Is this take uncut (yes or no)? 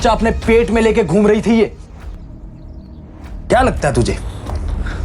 no